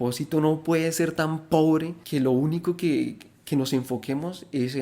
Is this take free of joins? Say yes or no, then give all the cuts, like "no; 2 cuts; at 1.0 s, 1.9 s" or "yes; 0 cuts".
no; 1 cut; at 2.0 s